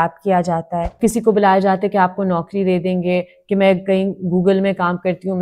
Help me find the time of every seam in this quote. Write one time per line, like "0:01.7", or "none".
0:00.9